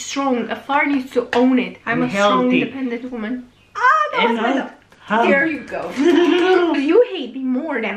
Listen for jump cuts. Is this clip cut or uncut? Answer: cut